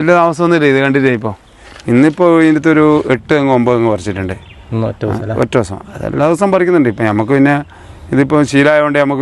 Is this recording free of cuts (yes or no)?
yes